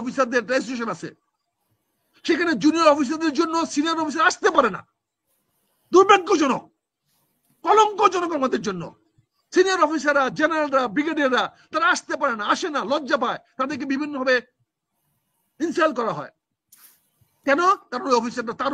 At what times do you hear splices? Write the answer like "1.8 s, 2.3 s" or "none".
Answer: none